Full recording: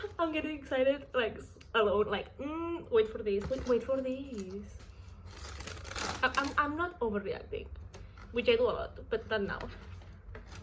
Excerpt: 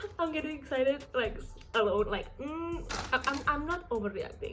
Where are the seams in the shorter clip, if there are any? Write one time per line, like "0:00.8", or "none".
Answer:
0:02.8